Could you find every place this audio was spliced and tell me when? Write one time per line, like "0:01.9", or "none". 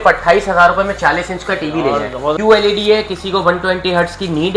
0:02.4